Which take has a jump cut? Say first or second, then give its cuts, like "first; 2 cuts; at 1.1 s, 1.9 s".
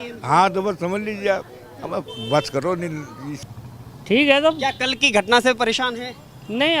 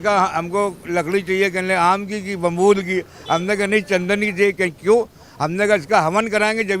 first; 1 cut; at 3.4 s